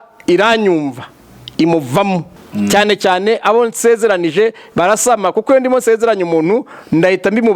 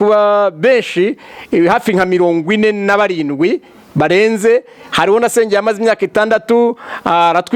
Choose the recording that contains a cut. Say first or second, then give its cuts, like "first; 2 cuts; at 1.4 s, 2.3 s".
first; 1 cut; at 2.4 s